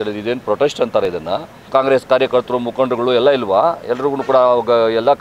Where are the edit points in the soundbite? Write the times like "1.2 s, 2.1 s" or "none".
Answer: 1.7 s

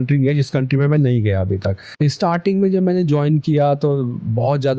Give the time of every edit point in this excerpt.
2.1 s

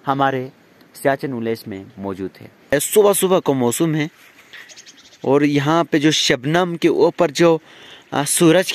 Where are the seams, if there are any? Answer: 2.7 s

